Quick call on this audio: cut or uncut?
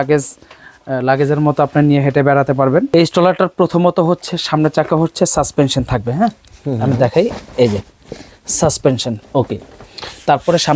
cut